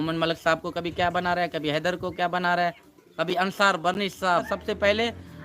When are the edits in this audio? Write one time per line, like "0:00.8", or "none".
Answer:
0:04.5